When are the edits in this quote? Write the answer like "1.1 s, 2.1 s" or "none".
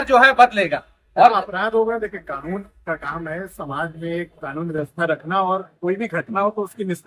none